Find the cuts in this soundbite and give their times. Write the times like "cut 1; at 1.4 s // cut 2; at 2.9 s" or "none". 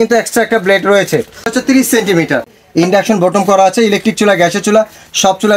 cut 1; at 1.5 s // cut 2; at 2.6 s